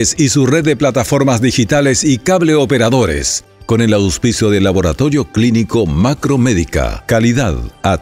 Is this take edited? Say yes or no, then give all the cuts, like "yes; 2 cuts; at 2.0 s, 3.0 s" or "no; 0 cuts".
no; 0 cuts